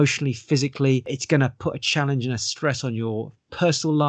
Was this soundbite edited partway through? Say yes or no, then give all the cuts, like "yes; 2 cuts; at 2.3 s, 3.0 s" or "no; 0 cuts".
yes; 1 cut; at 1.1 s